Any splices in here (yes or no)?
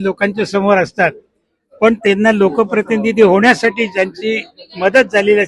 no